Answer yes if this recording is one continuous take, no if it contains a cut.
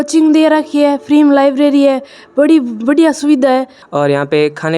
no